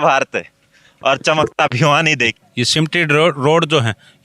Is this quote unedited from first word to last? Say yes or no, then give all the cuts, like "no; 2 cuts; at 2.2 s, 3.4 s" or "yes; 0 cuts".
no; 1 cut; at 2.2 s